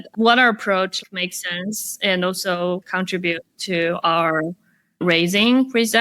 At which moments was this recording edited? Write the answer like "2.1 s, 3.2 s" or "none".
1.0 s, 2.8 s